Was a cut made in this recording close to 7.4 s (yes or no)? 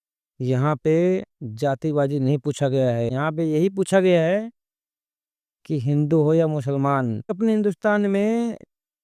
yes